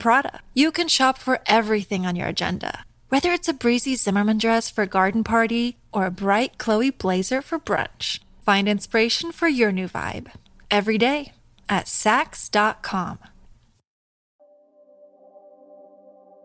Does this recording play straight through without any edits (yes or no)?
no